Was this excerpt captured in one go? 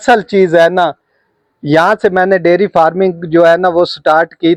yes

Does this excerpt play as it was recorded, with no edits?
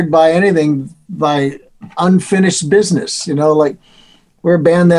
yes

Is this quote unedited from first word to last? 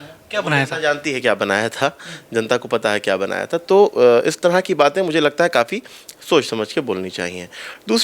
yes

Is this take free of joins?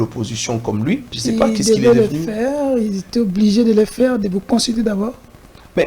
no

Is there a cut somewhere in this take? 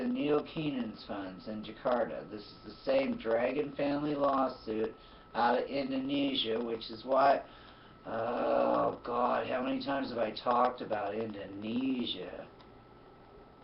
yes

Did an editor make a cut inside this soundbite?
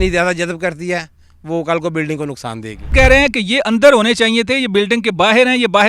yes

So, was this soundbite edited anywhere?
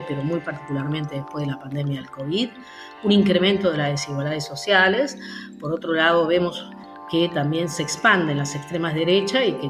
no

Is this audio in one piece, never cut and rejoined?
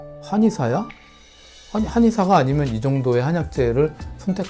yes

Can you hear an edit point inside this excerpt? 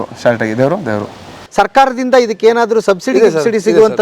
yes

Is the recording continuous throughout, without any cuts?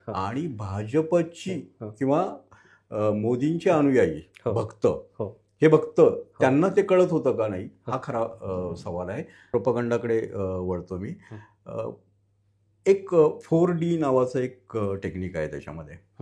no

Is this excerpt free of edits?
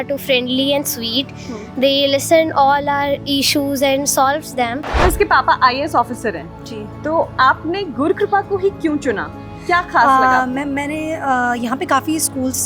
no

